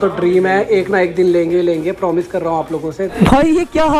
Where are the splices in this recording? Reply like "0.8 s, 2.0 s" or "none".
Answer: 3.1 s